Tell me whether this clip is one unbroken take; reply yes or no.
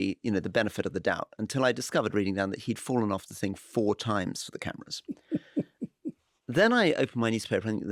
yes